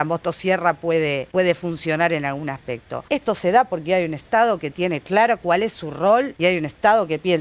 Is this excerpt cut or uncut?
cut